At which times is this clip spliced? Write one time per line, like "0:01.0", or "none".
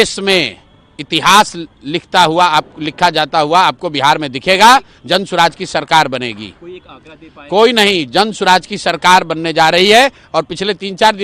none